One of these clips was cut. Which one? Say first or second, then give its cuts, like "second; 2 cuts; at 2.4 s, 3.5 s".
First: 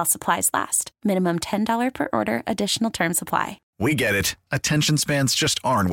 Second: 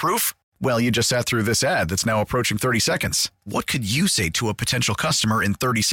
first; 1 cut; at 3.6 s